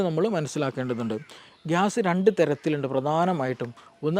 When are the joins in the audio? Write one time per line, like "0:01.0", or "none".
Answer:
0:01.4